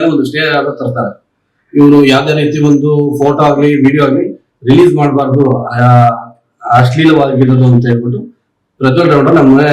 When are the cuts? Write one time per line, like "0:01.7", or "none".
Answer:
none

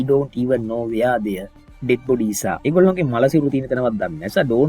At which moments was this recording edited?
0:02.6

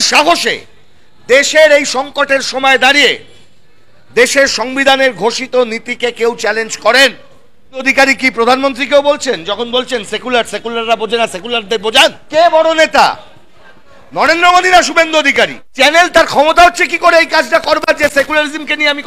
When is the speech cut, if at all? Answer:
0:07.9
0:12.2
0:15.6

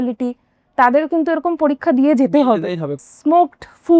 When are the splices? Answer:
0:03.0

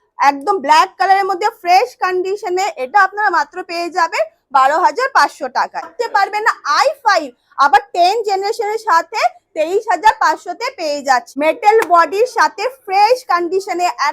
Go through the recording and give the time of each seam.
0:05.9
0:11.3

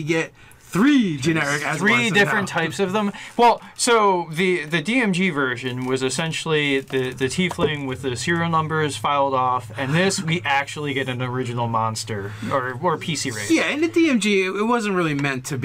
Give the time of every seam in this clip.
0:10.7

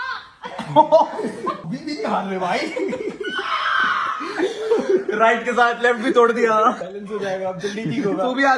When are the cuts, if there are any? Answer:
0:01.6
0:06.8

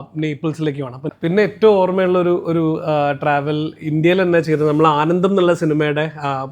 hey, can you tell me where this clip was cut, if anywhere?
0:01.0

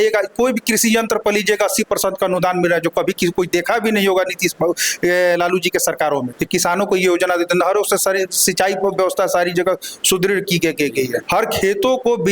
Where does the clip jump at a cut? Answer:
0:06.4
0:11.2

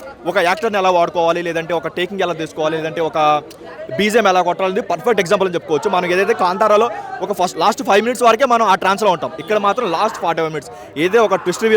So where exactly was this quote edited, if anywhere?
none

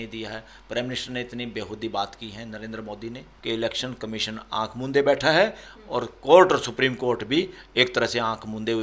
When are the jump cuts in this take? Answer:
0:03.3

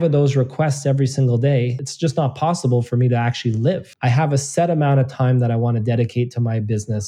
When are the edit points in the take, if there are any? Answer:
0:03.9

